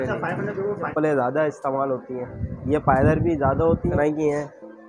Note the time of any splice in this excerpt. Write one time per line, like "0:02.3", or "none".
0:00.9
0:03.9